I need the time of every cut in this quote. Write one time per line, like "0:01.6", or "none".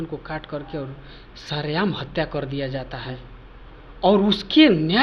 none